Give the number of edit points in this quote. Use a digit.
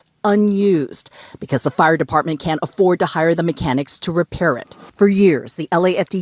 1